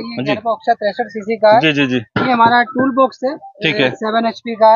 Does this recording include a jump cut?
no; 0 cuts

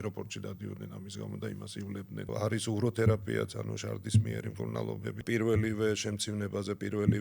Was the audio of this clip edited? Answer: yes; 2 cuts; at 2.3 s, 5.2 s

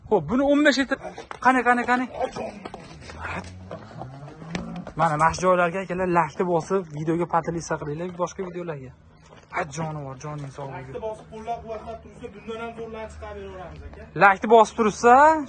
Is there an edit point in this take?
yes; 1 cut; at 0.9 s

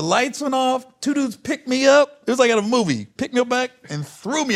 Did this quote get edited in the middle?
no; 0 cuts

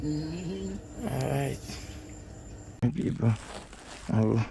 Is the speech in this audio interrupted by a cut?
yes; 1 cut; at 2.8 s

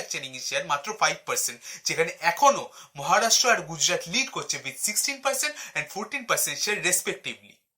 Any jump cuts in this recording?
no; 0 cuts

